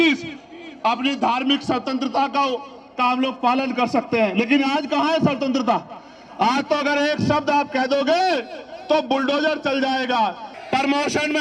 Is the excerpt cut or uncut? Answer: cut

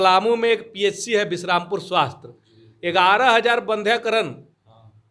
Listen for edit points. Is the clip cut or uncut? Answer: uncut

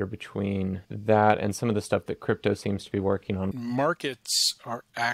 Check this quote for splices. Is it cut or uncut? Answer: cut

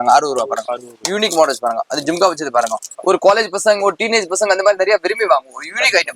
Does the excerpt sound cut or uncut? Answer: cut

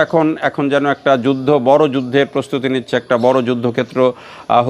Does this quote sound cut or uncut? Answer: uncut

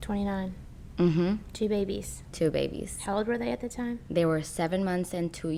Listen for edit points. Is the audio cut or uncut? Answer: uncut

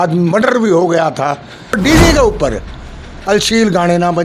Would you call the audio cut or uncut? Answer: cut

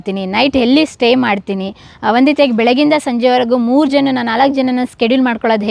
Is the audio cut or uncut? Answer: uncut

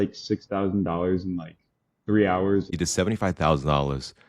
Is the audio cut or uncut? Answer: cut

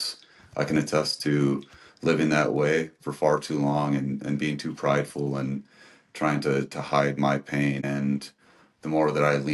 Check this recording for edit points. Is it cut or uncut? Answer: cut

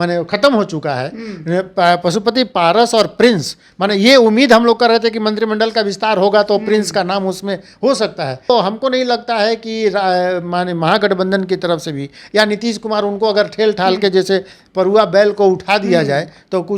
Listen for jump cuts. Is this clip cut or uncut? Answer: cut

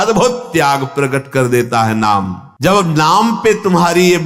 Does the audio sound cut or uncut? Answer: cut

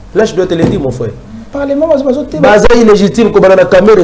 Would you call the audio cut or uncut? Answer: uncut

